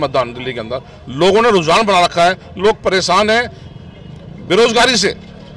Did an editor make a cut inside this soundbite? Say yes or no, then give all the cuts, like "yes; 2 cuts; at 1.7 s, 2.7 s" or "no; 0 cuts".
no; 0 cuts